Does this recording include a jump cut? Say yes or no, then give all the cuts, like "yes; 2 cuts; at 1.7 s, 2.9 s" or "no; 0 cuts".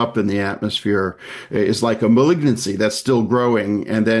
no; 0 cuts